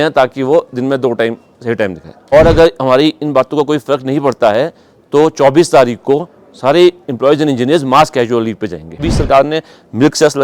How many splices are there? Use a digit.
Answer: 2